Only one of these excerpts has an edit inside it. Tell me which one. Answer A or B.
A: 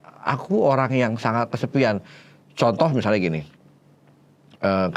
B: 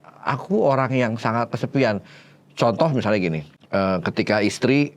B